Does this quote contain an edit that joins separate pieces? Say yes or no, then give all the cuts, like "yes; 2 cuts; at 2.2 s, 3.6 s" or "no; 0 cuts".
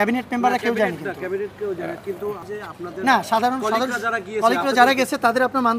yes; 1 cut; at 2.4 s